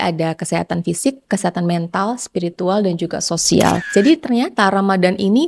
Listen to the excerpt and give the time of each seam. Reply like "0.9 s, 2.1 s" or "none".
3.8 s

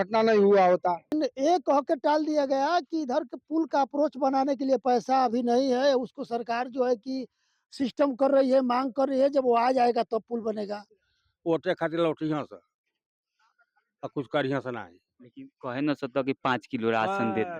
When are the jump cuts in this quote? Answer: 1.2 s, 10.8 s

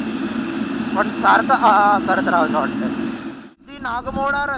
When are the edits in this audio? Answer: 3.4 s

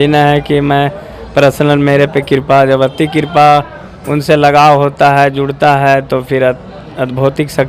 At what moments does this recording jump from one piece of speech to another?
none

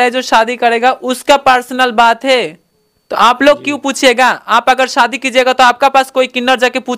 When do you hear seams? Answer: none

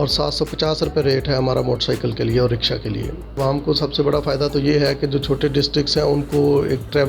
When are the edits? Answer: 3.4 s

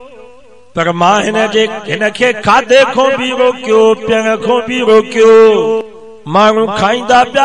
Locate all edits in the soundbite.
6.0 s

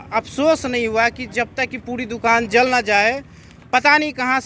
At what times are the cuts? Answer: none

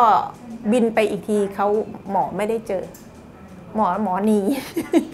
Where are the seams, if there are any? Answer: none

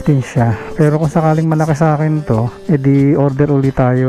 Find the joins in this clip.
none

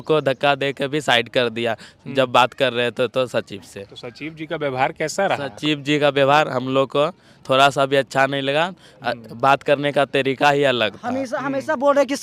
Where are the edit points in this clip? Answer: none

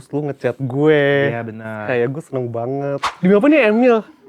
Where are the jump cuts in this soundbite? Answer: 3.1 s

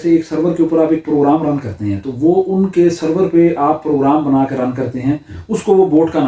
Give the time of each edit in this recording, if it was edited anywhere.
none

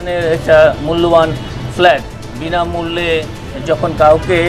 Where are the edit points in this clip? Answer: none

